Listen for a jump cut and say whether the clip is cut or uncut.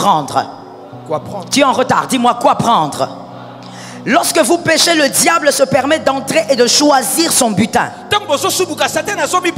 uncut